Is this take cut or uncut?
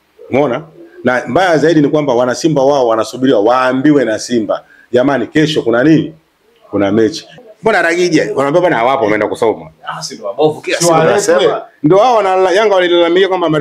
cut